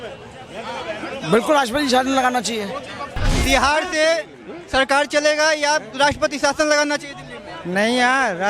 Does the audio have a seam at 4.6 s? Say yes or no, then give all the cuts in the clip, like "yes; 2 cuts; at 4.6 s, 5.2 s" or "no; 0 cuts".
no; 1 cut; at 3.3 s